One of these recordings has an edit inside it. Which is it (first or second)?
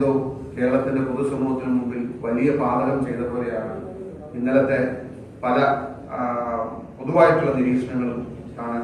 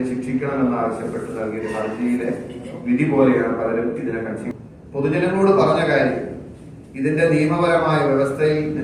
second